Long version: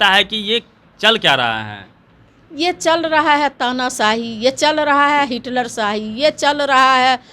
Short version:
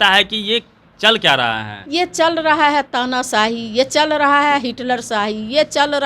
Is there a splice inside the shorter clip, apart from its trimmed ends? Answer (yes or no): yes